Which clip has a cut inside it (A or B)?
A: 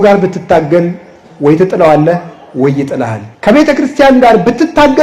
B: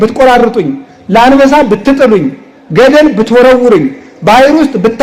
A